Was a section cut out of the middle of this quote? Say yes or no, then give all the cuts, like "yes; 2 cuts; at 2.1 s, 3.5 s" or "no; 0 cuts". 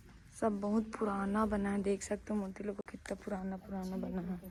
no; 0 cuts